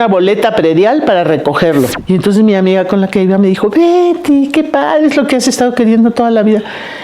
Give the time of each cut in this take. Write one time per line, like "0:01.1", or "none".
0:02.0

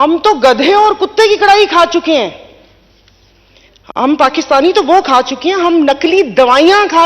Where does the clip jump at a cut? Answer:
none

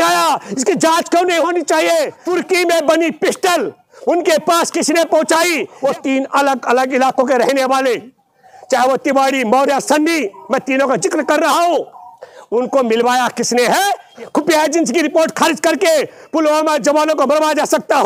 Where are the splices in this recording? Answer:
0:02.2
0:05.7
0:14.1

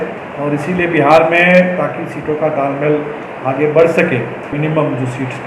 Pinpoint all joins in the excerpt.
0:04.5

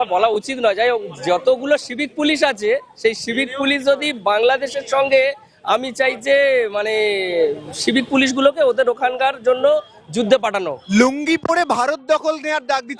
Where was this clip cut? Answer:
0:10.8

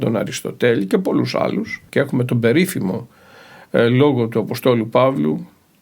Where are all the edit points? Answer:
0:01.8

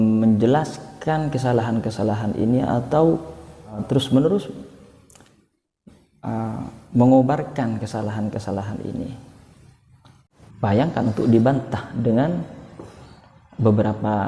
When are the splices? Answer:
0:03.8
0:10.2

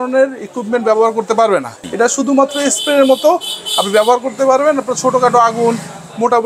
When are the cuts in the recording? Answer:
0:01.8

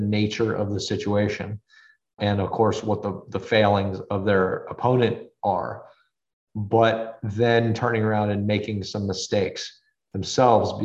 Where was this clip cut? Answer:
0:02.1
0:04.0

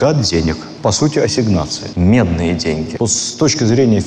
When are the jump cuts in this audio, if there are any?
0:02.9

